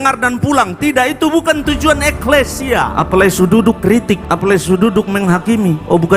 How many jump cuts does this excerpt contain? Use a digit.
2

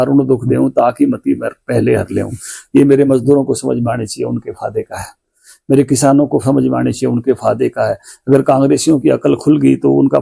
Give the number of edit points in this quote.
0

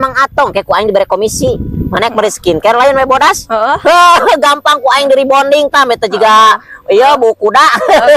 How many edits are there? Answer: 0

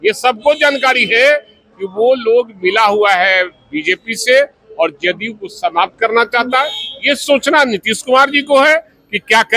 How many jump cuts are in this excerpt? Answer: 0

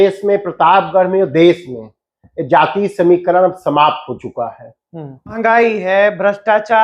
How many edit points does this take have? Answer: 1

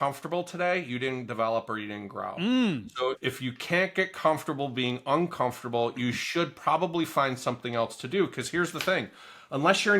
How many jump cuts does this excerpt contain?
1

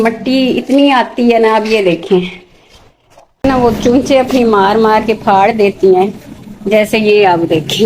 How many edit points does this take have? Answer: 1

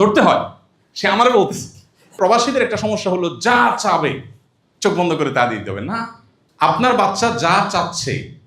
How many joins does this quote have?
1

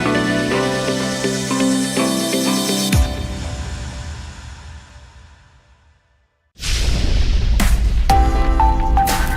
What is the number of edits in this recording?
1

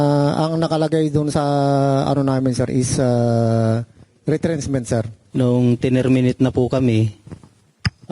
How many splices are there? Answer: 1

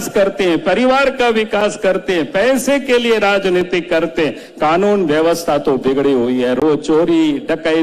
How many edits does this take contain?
0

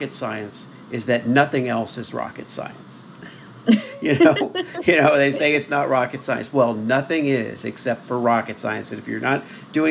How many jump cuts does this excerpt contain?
0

